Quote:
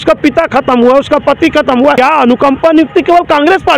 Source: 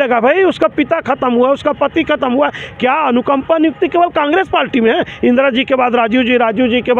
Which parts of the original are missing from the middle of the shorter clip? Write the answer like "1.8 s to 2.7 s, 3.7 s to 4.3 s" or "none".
2.5 s to 2.8 s